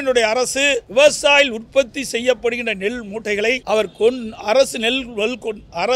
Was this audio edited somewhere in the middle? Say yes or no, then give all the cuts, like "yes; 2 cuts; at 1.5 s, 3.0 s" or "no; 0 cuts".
yes; 2 cuts; at 0.9 s, 3.6 s